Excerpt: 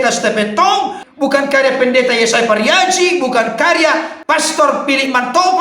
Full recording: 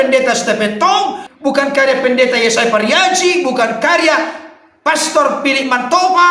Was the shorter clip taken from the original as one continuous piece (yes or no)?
no